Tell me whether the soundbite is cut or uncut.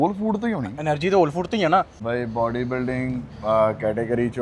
cut